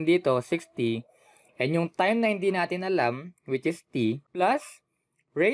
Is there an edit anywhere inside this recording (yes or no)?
yes